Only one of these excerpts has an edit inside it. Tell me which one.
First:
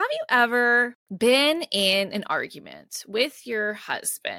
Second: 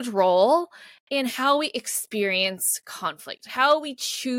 first; 1 cut; at 1.0 s

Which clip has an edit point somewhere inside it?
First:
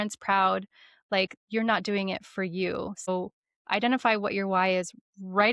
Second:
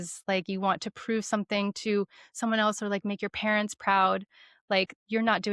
first; 1 cut; at 3.1 s

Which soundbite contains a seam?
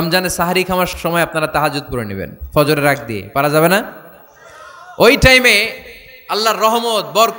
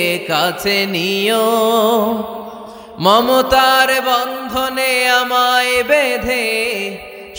first; 1 cut; at 0.9 s

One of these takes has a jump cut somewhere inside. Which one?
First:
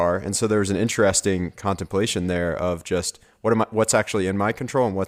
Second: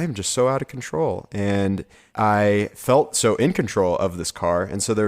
second; 2 cuts; at 2.0 s, 2.8 s

